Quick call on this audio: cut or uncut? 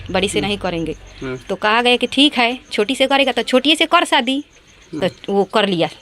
uncut